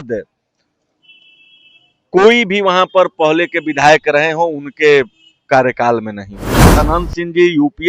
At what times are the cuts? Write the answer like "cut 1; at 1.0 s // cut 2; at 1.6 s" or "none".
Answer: cut 1; at 6.7 s